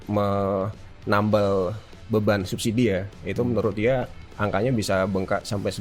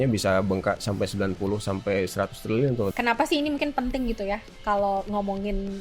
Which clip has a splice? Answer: second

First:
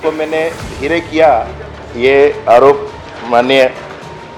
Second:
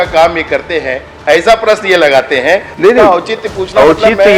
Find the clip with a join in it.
second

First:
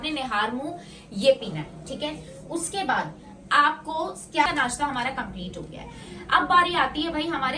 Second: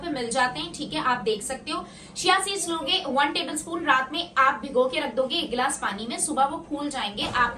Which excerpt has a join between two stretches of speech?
first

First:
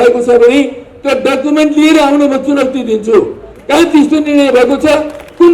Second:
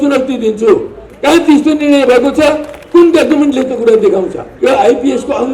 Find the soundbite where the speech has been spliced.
second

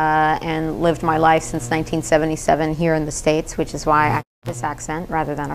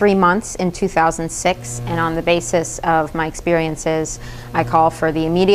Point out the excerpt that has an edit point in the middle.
first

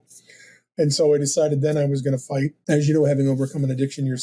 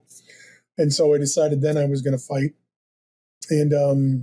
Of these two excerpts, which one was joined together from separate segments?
first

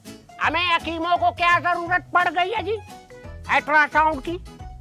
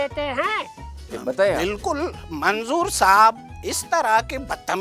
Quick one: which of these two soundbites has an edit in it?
second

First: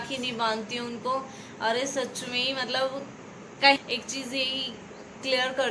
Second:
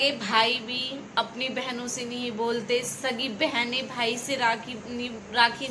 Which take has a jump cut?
first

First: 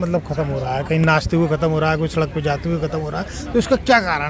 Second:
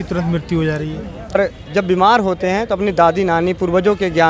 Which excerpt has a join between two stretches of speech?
second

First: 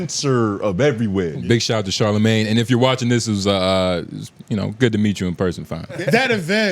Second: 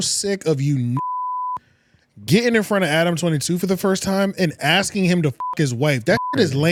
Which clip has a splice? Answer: first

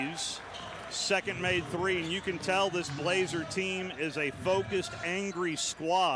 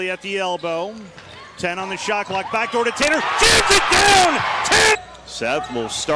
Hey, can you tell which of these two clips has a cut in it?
second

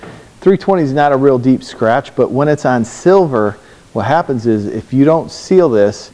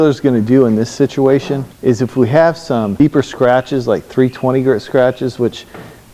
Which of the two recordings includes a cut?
second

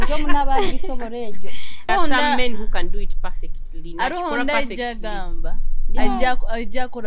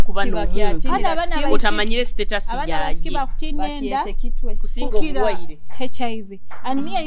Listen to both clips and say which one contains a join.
first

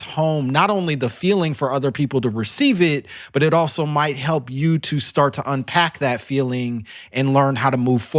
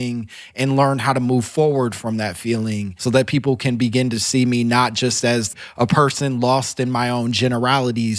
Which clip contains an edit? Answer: second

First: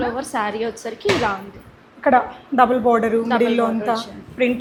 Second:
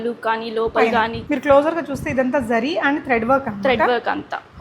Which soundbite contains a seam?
second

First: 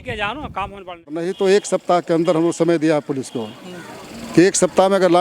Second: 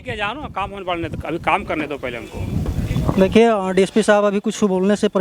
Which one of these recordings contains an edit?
first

